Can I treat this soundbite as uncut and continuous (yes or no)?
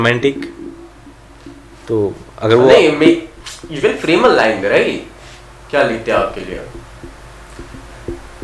yes